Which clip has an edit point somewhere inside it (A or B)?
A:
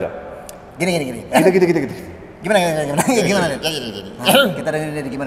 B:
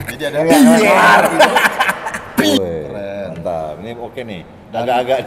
B